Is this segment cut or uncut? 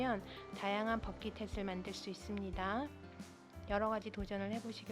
uncut